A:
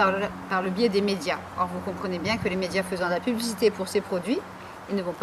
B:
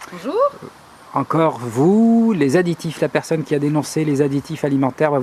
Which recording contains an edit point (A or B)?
A